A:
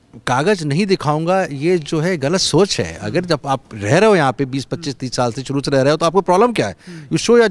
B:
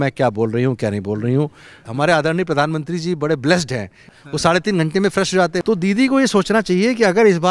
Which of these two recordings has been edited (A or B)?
B